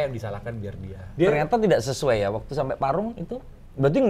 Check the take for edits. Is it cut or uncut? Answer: cut